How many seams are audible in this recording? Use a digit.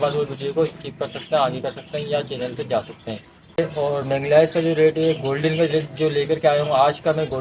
1